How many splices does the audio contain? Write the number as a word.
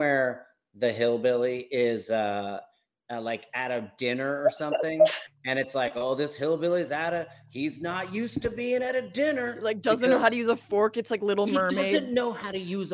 zero